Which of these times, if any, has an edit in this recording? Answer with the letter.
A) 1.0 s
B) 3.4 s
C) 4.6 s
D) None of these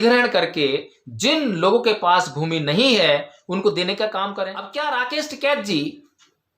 C